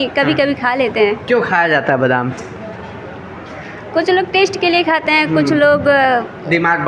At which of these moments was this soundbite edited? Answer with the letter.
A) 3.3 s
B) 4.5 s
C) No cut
C